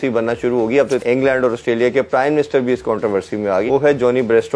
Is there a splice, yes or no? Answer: yes